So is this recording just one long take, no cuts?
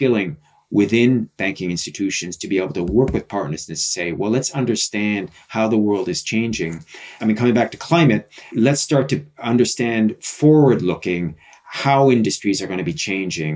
no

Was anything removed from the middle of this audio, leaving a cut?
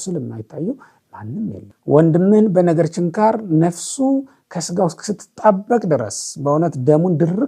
yes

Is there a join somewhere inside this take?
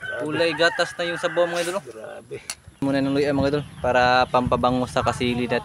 yes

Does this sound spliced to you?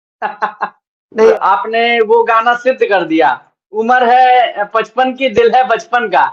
yes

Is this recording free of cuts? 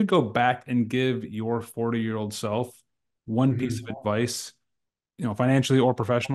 yes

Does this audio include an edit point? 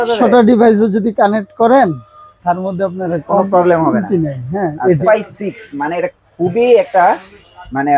yes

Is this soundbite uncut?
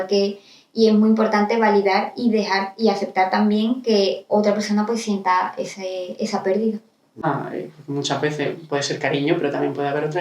no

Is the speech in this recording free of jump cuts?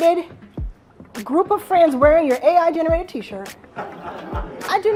yes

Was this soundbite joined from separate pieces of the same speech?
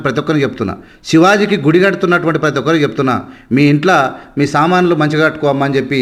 no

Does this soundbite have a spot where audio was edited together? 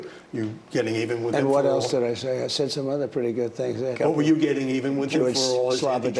yes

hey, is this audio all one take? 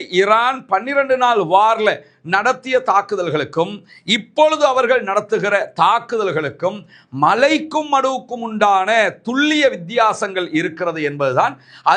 yes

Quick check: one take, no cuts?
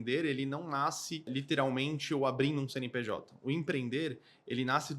no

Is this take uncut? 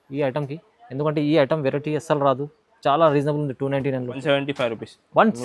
no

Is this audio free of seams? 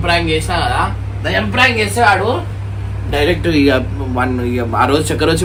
yes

